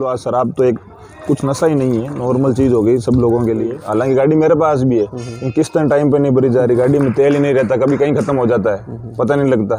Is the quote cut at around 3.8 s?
yes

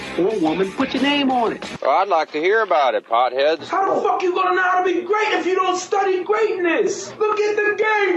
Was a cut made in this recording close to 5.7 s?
no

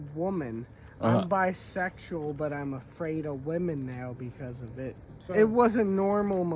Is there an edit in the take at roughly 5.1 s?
yes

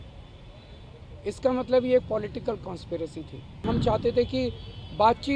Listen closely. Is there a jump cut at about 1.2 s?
no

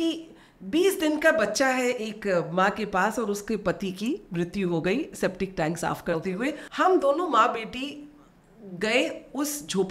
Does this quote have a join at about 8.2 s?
no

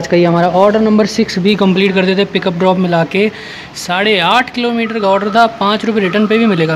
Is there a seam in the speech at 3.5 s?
no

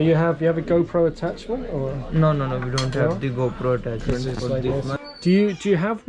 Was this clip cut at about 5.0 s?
yes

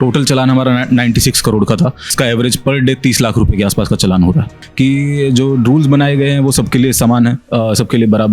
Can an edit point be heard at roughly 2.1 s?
yes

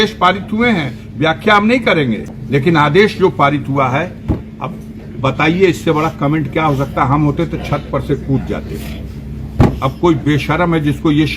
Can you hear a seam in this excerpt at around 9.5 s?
no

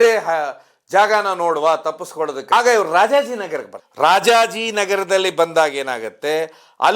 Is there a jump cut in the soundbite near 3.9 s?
no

